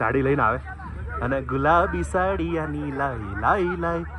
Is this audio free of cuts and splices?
yes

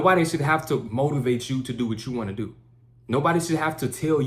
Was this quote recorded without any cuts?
yes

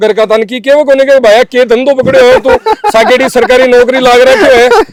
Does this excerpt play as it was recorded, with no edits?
yes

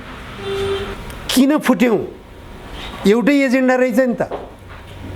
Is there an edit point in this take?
yes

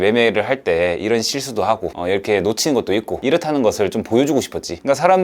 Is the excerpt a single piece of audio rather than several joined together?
yes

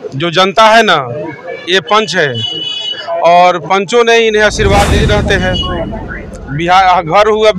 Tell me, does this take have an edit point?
yes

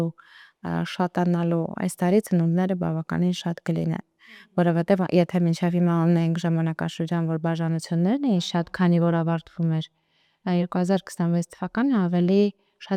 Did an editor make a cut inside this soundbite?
no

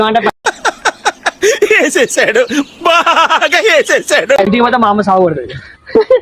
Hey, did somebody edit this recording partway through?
yes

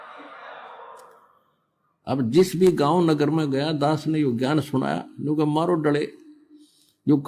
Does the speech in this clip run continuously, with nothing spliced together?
yes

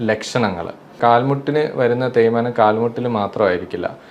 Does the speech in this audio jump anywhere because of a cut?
yes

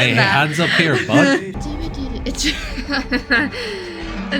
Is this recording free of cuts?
no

